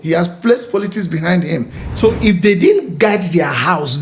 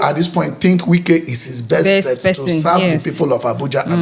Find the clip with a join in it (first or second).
first